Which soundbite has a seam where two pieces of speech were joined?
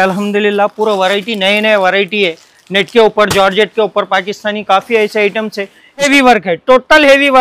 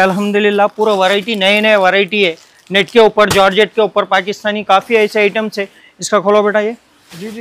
first; 1 cut; at 6.1 s

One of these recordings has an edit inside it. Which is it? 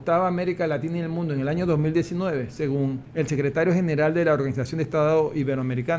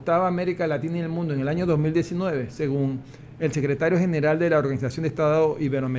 first; 1 cut; at 3.0 s

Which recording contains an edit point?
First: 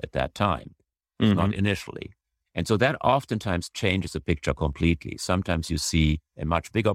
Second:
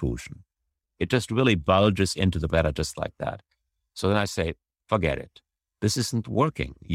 second; 1 cut; at 2.5 s

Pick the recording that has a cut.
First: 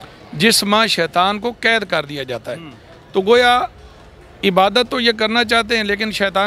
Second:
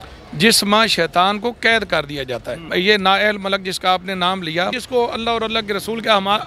second; 2 cuts; at 2.6 s, 4.8 s

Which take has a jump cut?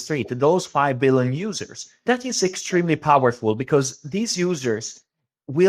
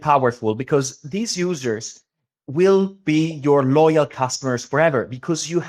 first; 1 cut; at 2.0 s

